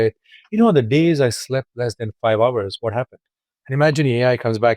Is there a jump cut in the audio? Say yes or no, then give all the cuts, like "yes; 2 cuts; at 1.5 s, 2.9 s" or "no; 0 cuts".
yes; 1 cut; at 3.7 s